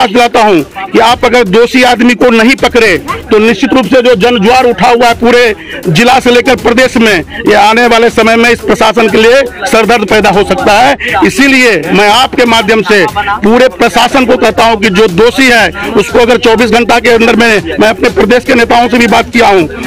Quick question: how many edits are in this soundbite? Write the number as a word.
zero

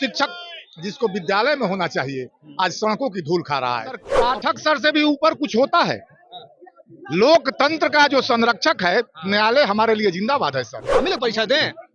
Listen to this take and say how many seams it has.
two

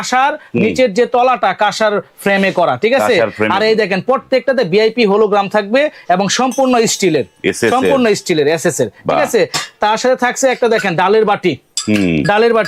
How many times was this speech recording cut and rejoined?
zero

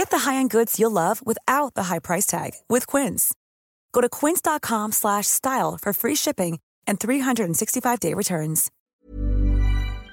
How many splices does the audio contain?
one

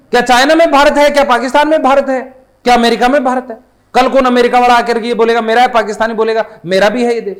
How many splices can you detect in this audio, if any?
zero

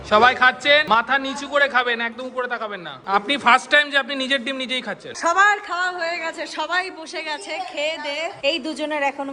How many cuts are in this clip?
three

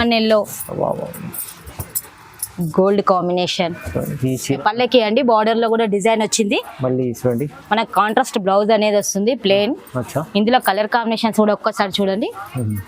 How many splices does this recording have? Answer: one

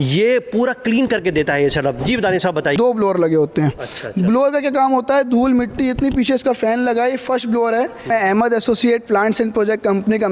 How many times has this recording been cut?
two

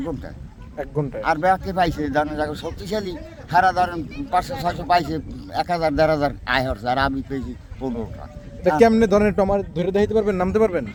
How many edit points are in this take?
zero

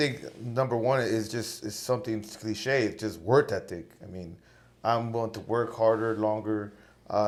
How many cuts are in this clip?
zero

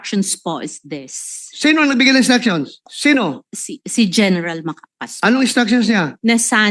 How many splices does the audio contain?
one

